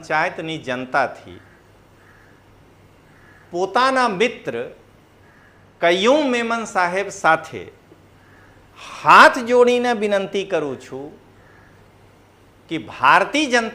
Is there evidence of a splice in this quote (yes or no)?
no